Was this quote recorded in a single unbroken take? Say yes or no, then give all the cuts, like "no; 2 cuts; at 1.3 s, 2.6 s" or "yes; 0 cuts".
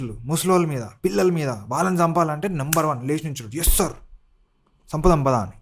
yes; 0 cuts